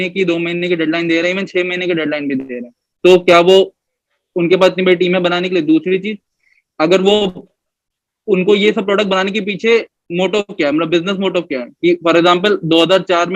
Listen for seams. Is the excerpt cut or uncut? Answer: uncut